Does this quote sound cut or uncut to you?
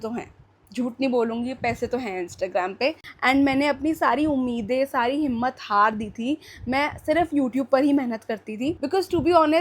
cut